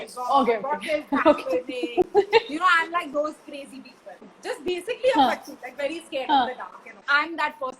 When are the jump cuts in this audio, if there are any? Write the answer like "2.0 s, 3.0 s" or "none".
4.3 s, 7.0 s